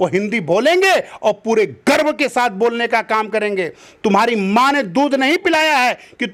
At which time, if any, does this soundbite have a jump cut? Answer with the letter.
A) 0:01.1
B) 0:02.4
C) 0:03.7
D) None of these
D